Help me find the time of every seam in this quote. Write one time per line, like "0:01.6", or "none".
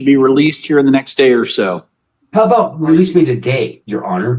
none

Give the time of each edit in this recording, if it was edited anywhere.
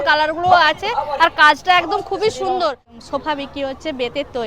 0:02.8

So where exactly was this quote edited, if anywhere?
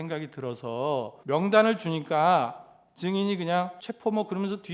0:01.1
0:03.8

